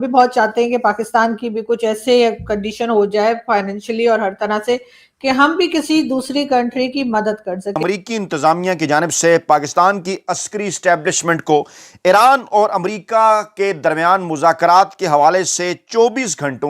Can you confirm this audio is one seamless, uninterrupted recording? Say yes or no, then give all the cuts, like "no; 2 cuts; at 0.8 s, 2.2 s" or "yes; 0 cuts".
no; 1 cut; at 7.7 s